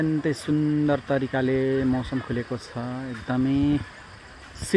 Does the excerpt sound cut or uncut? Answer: uncut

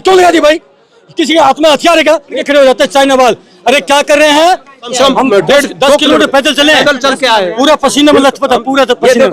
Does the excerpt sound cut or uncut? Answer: cut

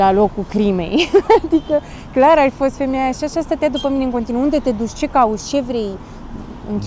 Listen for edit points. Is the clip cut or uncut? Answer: uncut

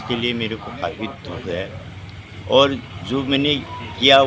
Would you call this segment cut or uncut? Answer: uncut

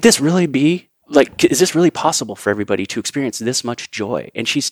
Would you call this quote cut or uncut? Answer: cut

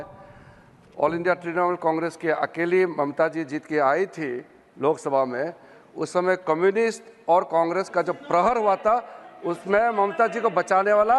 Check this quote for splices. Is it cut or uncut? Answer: uncut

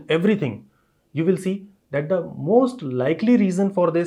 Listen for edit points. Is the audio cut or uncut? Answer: uncut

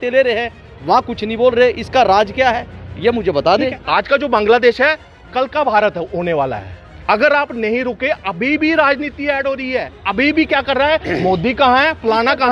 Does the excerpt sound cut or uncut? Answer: cut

